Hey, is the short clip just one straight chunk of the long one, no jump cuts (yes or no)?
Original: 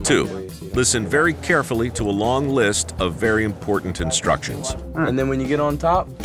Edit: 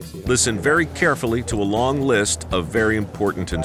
yes